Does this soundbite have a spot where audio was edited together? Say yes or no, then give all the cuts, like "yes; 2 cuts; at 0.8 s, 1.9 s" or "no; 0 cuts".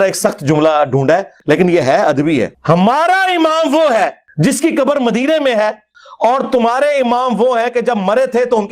yes; 1 cut; at 1.4 s